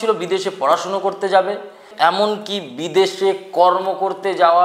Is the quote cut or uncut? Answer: cut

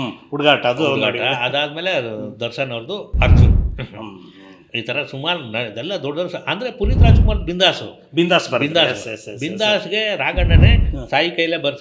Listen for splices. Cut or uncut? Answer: uncut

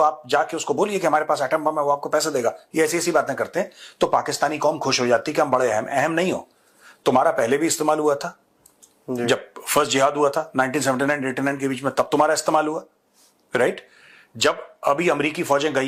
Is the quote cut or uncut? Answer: uncut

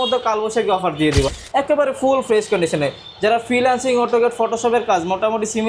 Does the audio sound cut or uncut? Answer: cut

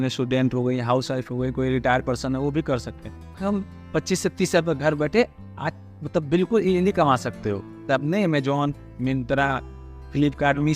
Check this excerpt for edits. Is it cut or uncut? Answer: cut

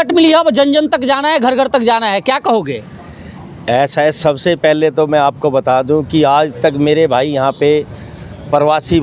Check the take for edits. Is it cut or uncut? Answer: uncut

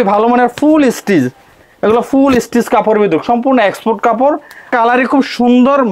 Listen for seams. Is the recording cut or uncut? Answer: cut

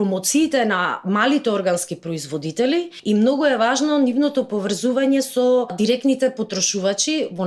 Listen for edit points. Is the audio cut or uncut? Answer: cut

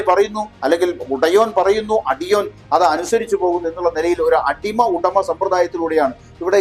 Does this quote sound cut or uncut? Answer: uncut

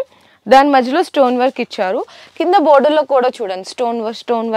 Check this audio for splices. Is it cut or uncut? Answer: uncut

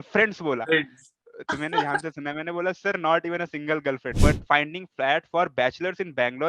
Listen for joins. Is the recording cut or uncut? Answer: cut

